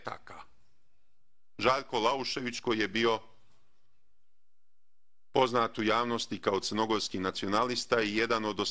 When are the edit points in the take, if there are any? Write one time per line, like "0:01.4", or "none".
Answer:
0:06.8